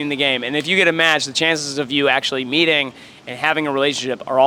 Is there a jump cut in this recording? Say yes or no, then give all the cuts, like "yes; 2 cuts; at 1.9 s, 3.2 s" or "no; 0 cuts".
no; 0 cuts